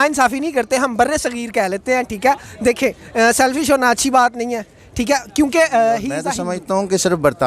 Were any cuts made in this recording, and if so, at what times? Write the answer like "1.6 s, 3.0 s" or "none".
6.4 s